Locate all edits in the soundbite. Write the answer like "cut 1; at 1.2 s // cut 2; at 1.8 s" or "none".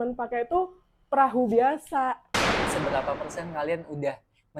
cut 1; at 2.7 s

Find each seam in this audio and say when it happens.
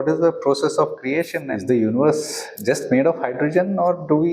cut 1; at 1.4 s

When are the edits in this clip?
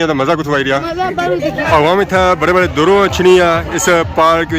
cut 1; at 1.6 s

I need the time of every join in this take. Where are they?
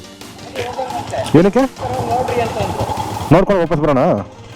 cut 1; at 1.8 s

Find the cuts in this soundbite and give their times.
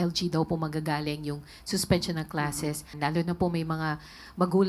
cut 1; at 2.9 s

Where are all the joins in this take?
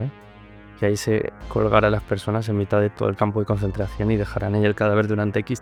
none

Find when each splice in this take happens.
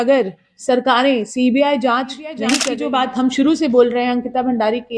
cut 1; at 2.7 s

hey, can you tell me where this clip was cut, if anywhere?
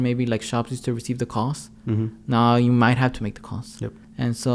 none

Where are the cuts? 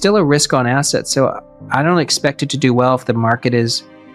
none

